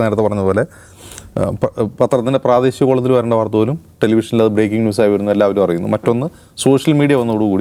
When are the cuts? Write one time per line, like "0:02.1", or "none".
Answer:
none